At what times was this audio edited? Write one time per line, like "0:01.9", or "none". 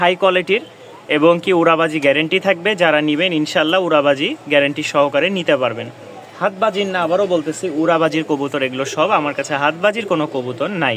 none